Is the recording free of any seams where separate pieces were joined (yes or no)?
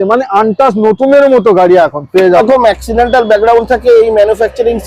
no